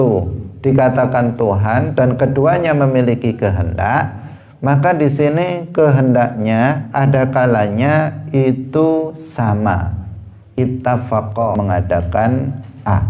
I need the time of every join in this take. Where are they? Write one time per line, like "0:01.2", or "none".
0:11.5

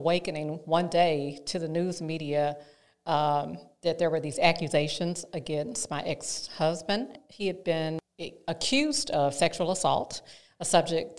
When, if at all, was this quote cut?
0:07.2
0:08.0

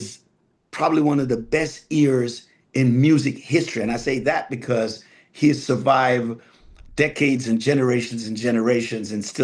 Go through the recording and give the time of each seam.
none

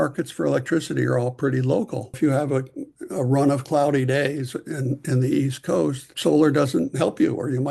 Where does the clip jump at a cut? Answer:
0:02.2

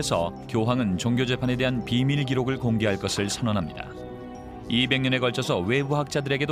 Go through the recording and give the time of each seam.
0:05.2

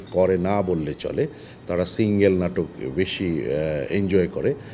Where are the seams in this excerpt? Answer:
none

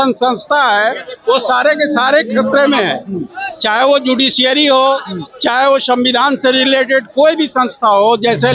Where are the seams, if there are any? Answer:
none

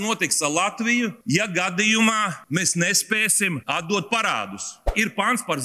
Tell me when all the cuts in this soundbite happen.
0:01.2
0:02.4
0:03.6
0:04.9

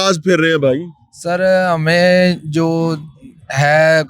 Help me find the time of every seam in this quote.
none

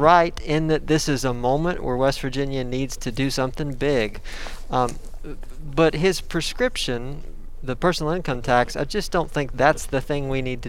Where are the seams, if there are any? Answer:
none

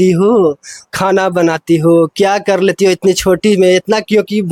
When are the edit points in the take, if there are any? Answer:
none

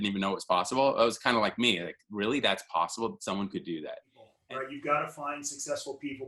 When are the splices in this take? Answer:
0:04.4

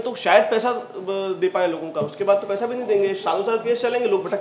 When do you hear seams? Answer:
none

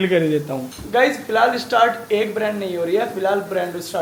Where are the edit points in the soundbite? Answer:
none

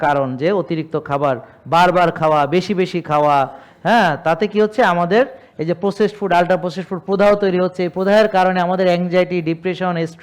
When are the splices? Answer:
none

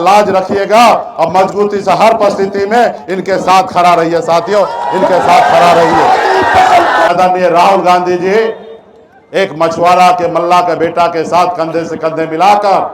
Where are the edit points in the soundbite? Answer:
0:07.1

